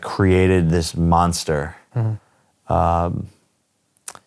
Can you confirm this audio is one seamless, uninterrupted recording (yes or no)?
no